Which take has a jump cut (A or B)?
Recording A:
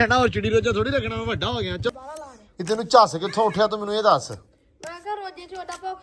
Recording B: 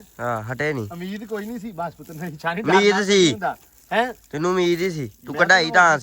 A